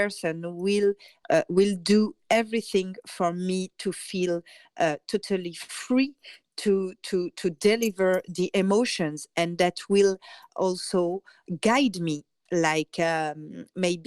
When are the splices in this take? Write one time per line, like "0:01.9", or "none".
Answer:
0:01.1
0:10.4
0:11.4
0:12.3